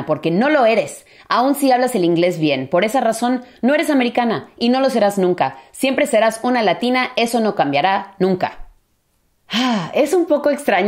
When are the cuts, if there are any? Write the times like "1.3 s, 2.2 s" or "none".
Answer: none